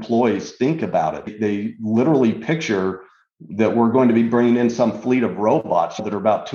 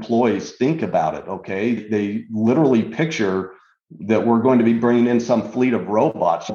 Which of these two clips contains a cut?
first; 1 cut; at 1.3 s

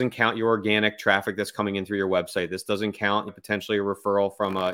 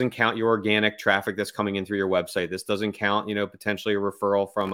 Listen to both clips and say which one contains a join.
first; 1 cut; at 3.3 s

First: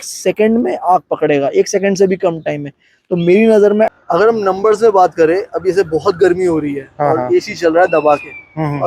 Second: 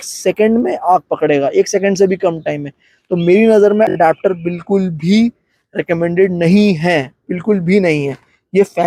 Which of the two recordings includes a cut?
first; 1 cut; at 3.9 s

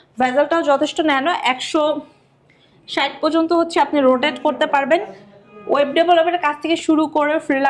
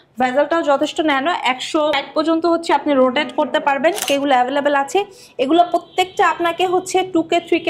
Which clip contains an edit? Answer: second; 2 cuts; at 1.9 s, 4.1 s

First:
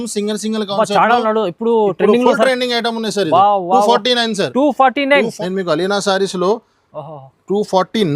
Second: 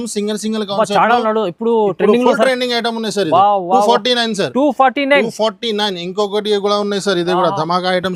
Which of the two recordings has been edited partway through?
first; 1 cut; at 5.3 s

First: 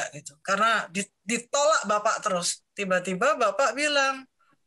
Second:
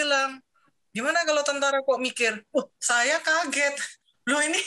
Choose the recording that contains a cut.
first; 1 cut; at 2.5 s

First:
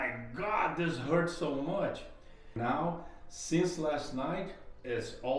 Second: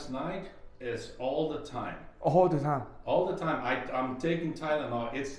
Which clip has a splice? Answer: first; 1 cut; at 2.5 s

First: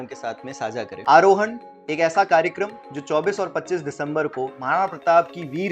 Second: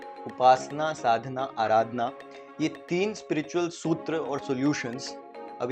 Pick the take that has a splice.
first; 1 cut; at 0.9 s

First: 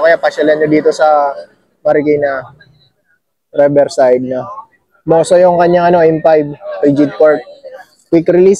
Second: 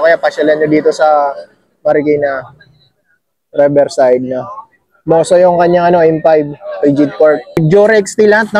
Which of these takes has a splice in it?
second; 1 cut; at 7.6 s

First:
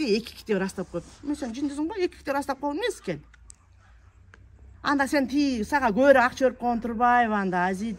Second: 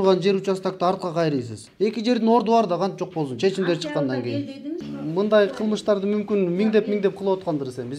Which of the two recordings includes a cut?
second; 2 cuts; at 1.6 s, 4.9 s

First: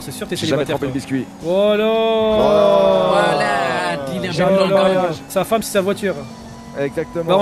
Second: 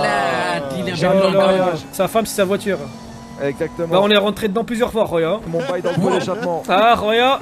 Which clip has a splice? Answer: second; 1 cut; at 5.5 s

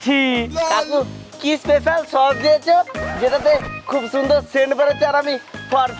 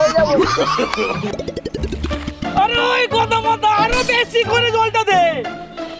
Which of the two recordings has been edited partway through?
second; 1 cut; at 1.3 s

